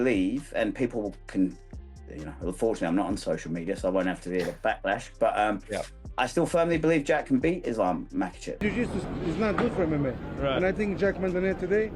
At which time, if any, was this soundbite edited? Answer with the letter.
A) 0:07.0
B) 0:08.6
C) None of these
B